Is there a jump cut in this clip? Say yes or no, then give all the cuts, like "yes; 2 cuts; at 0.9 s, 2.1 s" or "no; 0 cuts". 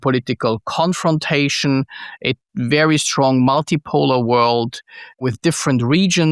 yes; 1 cut; at 5.2 s